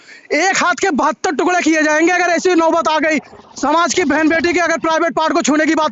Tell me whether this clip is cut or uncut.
uncut